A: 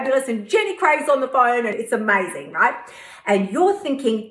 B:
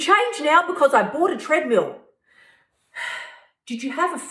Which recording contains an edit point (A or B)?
A